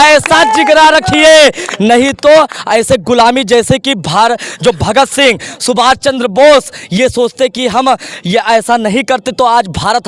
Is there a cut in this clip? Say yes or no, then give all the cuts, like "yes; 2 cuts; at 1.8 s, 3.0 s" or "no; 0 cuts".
no; 0 cuts